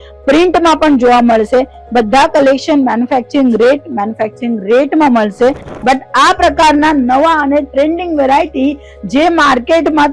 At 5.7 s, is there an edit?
yes; 1 cut; at 5.7 s

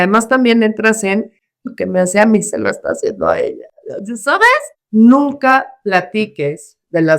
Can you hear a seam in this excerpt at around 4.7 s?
yes; 1 cut; at 4.7 s

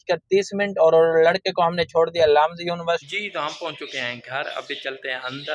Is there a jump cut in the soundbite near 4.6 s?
no; 1 cut; at 3.0 s

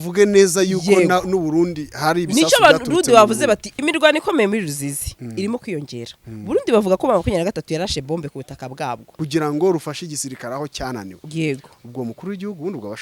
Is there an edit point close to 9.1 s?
yes; 2 cuts; at 3.7 s, 9.1 s

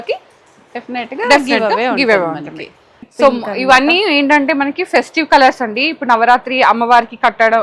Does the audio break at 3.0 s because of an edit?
yes; 1 cut; at 3.0 s

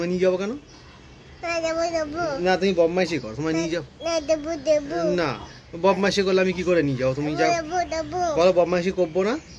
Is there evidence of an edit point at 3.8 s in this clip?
no; 0 cuts

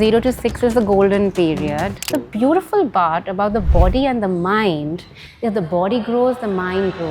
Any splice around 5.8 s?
no; 1 cut; at 2.0 s

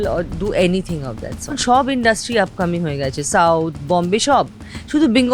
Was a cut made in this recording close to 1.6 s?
yes; 1 cut; at 1.6 s

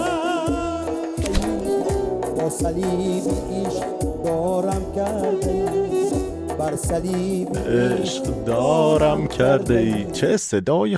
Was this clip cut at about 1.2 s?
yes; 1 cut; at 1.2 s

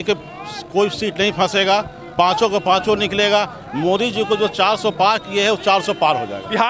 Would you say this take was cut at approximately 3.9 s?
no; 0 cuts

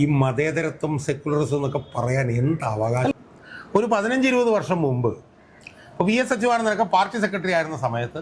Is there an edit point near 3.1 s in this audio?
yes; 1 cut; at 3.1 s

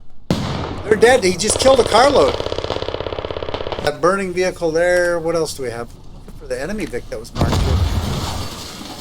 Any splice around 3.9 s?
yes; 1 cut; at 3.9 s

